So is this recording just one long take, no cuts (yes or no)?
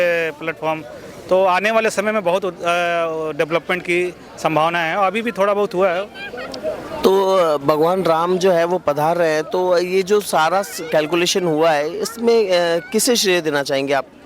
yes